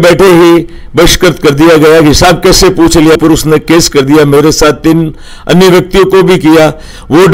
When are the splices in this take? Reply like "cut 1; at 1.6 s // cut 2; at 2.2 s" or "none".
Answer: none